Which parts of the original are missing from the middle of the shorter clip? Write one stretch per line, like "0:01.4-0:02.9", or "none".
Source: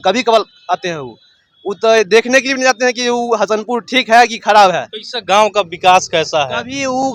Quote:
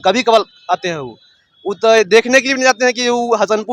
none